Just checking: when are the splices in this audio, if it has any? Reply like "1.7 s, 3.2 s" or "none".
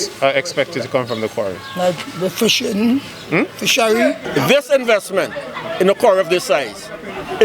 4.2 s